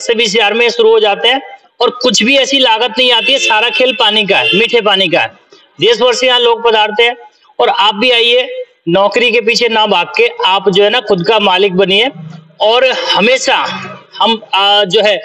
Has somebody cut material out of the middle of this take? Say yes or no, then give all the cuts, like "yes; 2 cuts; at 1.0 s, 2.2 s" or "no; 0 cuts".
no; 0 cuts